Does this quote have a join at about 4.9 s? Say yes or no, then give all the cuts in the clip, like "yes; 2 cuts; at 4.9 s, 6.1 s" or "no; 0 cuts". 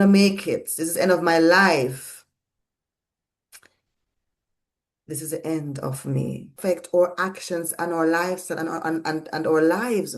no; 1 cut; at 6.6 s